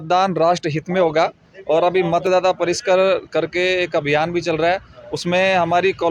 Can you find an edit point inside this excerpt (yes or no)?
no